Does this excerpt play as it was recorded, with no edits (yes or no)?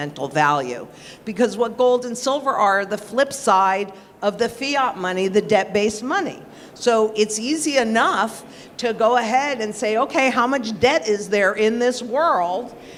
yes